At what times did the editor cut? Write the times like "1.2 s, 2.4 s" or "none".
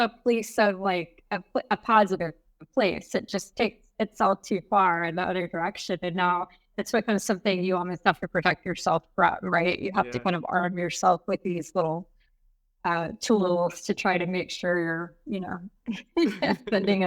none